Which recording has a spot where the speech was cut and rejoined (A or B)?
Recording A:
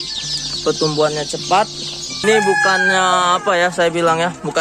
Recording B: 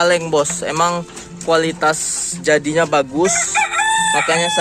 A